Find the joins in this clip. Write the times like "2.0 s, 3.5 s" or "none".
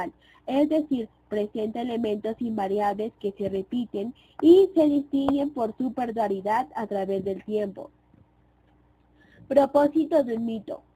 8.3 s